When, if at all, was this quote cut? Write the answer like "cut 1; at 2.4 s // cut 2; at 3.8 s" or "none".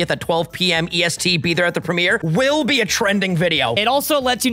cut 1; at 2.2 s // cut 2; at 3.6 s